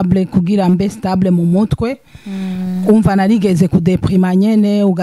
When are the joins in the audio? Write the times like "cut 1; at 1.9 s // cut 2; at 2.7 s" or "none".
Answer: none